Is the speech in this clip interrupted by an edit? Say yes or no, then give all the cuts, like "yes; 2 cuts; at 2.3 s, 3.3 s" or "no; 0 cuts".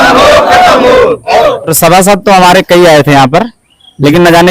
yes; 1 cut; at 1.4 s